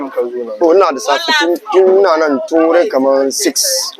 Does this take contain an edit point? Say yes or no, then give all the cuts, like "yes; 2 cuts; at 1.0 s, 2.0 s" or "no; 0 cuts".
no; 0 cuts